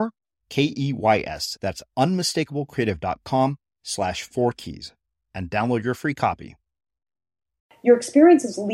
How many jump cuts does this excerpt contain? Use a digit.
1